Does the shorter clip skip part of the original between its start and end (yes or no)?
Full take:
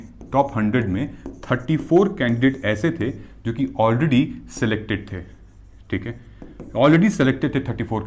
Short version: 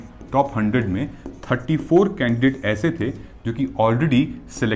no